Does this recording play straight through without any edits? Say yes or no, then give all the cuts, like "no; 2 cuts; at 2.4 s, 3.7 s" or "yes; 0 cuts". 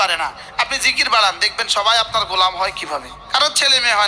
no; 1 cut; at 3.1 s